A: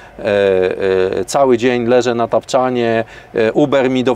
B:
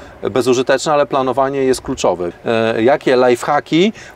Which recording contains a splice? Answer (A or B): B